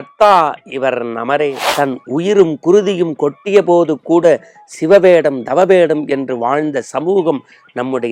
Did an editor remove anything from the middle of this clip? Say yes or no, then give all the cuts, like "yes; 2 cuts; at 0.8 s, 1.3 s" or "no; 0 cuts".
yes; 1 cut; at 1.6 s